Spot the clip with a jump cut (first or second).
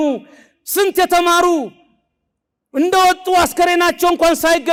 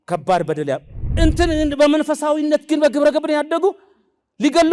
second